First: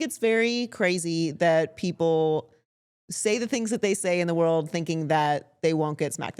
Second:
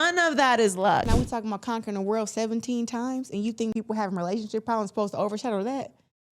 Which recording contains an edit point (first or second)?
second